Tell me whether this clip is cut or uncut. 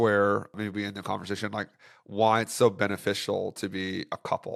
uncut